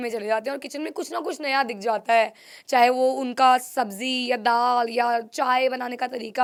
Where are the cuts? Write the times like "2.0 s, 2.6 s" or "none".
none